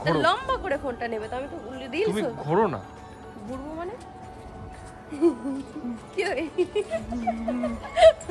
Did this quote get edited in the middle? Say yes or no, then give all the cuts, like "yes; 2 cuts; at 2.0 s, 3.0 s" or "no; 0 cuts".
no; 0 cuts